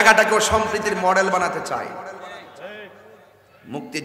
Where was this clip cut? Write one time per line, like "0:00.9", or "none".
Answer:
none